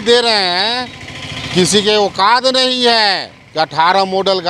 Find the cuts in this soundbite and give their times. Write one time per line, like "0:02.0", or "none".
none